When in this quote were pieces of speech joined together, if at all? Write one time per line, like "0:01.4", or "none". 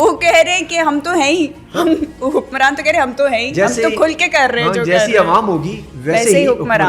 none